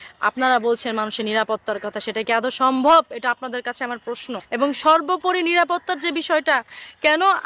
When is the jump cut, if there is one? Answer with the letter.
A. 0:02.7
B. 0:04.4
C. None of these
B